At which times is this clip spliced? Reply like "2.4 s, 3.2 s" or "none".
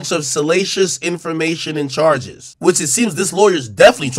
2.4 s